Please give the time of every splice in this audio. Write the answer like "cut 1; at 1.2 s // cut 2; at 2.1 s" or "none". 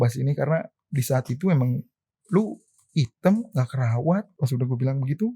cut 1; at 4.3 s